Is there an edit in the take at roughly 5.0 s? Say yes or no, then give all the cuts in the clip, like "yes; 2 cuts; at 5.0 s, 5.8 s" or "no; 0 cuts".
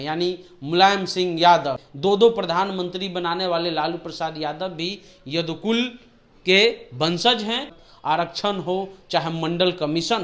no; 2 cuts; at 1.8 s, 7.8 s